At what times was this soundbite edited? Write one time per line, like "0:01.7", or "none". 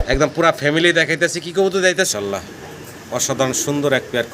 0:02.1